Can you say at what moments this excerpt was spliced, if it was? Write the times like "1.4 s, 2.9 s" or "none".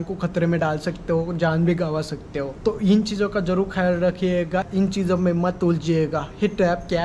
2.5 s, 4.7 s

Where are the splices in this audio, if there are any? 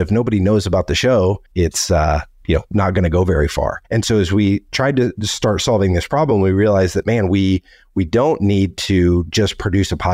1.4 s, 3.8 s

